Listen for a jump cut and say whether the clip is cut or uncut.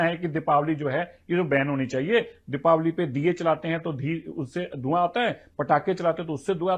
uncut